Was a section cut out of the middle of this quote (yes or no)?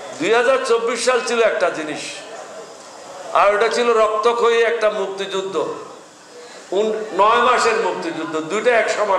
no